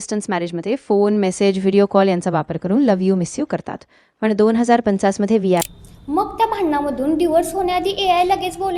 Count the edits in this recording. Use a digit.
1